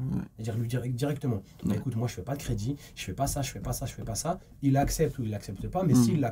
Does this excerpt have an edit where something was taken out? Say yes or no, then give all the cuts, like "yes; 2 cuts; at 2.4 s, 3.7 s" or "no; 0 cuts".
no; 0 cuts